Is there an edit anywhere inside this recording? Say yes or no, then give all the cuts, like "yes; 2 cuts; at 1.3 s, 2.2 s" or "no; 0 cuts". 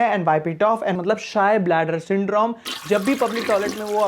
yes; 1 cut; at 0.9 s